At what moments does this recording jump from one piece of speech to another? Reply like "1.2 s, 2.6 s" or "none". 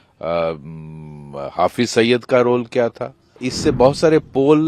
3.5 s